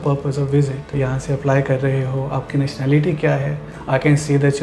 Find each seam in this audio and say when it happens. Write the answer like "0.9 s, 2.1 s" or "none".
0.9 s

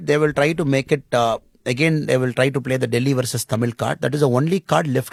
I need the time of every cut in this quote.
none

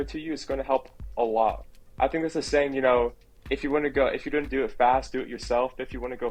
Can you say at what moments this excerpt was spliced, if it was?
none

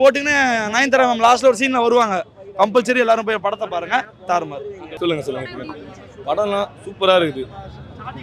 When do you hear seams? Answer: none

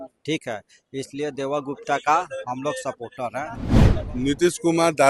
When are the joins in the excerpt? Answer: 3.7 s

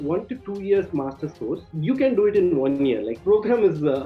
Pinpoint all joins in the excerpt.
1.6 s, 3.2 s

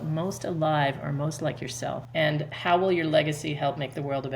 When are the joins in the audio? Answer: 2.0 s

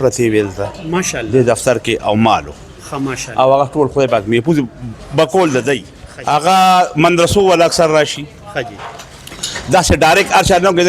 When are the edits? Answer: 5.9 s

